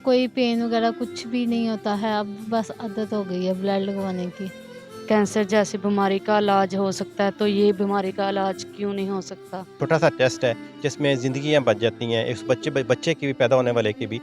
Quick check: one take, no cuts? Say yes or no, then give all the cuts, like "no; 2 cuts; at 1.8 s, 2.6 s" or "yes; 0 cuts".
no; 2 cuts; at 5.0 s, 9.8 s